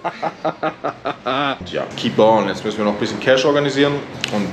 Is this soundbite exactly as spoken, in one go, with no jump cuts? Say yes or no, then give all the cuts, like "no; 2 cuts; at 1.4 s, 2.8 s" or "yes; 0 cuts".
no; 1 cut; at 1.6 s